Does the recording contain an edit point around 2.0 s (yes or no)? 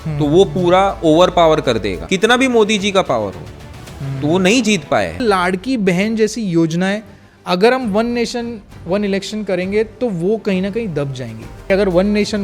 yes